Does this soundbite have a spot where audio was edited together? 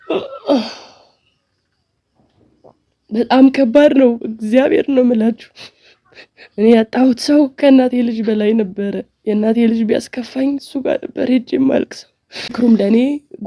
yes; 1 cut; at 12.5 s

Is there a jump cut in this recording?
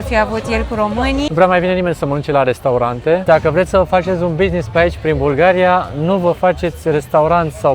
yes; 2 cuts; at 1.3 s, 3.2 s

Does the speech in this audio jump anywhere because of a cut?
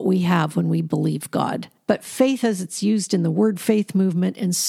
yes; 1 cut; at 1.7 s

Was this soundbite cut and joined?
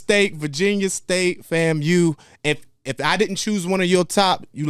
no; 0 cuts

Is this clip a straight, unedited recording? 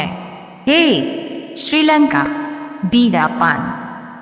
no; 1 cut; at 1.4 s

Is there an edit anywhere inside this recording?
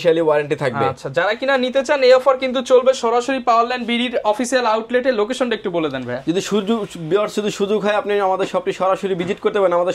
no; 0 cuts

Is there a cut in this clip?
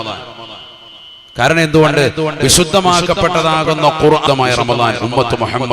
yes; 1 cut; at 4.2 s

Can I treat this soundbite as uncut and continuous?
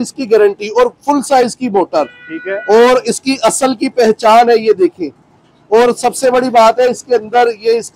yes; 0 cuts

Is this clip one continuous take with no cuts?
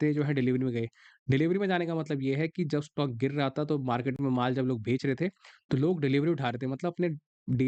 yes; 0 cuts

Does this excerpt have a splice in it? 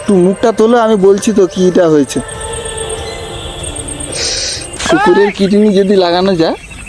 yes; 1 cut; at 4.7 s

